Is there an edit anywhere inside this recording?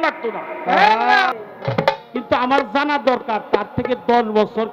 yes; 1 cut; at 1.3 s

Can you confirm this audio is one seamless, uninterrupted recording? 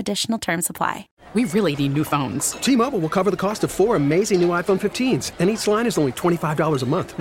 no; 1 cut; at 1.1 s

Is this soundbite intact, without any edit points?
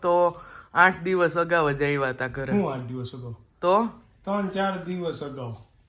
yes; 0 cuts

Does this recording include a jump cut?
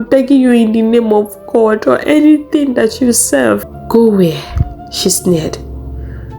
yes; 1 cut; at 3.7 s

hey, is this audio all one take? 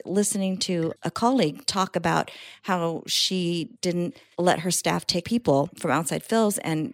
no; 2 cuts; at 4.0 s, 5.2 s

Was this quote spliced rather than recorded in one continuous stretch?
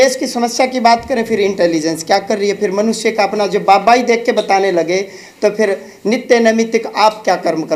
no; 0 cuts

